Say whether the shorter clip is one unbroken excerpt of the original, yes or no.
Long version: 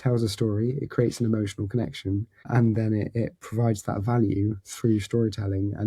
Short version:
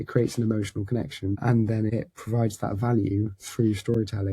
no